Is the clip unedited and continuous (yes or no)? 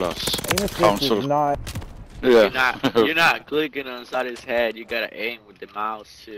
no